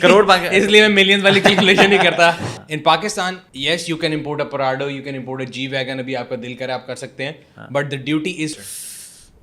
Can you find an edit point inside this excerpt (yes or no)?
yes